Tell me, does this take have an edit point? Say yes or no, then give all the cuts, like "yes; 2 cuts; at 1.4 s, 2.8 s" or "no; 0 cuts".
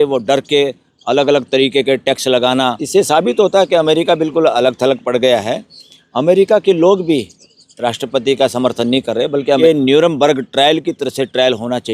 yes; 2 cuts; at 2.8 s, 9.6 s